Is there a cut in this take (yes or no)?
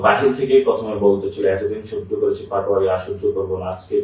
no